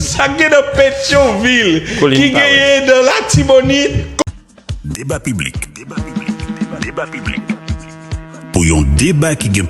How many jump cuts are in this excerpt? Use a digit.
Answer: 1